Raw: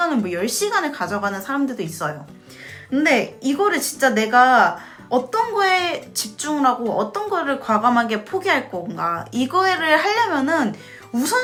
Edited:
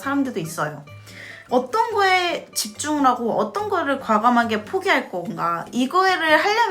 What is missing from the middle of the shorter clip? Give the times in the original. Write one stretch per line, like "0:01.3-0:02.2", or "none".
0:02.7-0:04.9